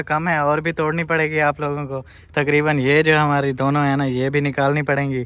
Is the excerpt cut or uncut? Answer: uncut